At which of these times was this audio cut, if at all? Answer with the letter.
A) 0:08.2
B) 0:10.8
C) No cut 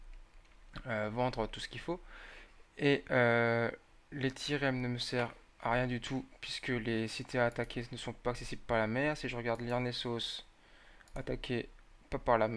C